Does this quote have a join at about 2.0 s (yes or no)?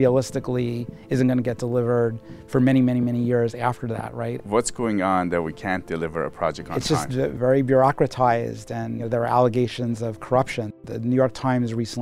no